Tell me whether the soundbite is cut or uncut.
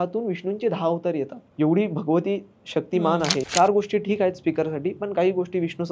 cut